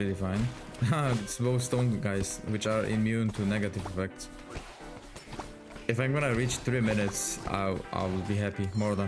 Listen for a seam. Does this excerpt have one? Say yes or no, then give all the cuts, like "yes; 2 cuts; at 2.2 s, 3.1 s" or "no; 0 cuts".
no; 0 cuts